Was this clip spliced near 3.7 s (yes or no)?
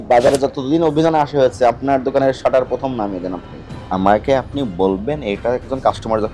yes